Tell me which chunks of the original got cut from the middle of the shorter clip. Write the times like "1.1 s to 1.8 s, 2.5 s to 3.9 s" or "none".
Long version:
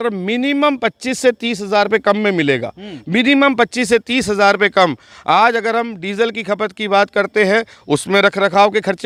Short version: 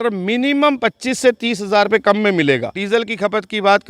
2.7 s to 6.0 s